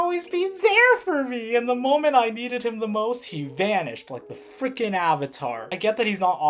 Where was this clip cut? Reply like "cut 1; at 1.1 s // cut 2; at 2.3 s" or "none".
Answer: none